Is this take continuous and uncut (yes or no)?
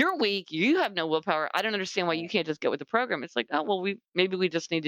yes